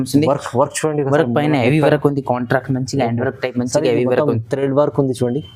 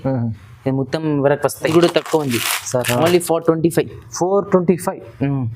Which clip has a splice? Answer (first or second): second